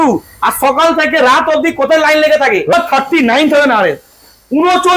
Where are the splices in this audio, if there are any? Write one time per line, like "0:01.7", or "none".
0:02.7